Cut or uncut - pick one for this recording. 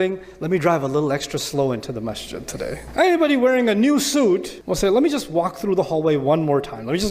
cut